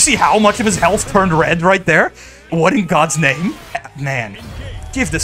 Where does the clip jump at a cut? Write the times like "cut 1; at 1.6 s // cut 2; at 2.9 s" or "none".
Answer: cut 1; at 2.5 s // cut 2; at 3.9 s